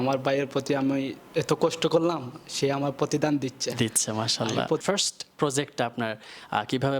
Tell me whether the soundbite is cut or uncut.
cut